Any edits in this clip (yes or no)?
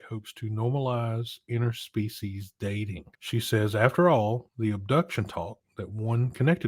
yes